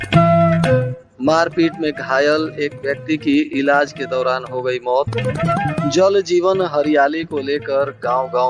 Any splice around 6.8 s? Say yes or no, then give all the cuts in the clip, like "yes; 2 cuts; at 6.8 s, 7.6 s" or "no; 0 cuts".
no; 1 cut; at 1.0 s